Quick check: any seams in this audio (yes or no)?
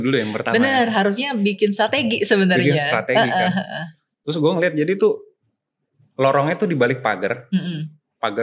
no